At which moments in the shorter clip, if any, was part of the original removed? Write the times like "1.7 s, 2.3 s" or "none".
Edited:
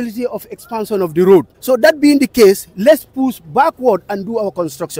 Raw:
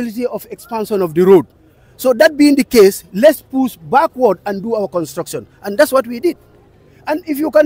1.5 s